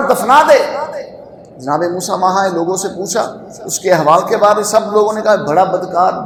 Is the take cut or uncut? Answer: uncut